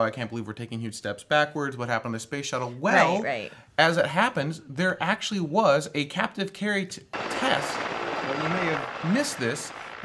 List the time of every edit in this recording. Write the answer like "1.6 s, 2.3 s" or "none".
none